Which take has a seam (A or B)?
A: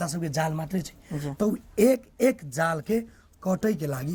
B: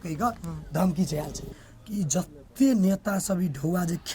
B